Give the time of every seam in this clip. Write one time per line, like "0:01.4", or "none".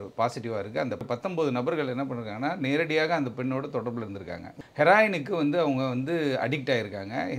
0:01.0
0:04.6